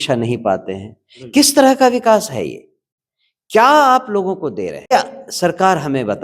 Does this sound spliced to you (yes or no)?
yes